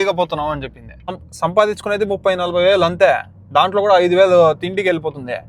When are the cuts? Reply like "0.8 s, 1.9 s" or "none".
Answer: 1.2 s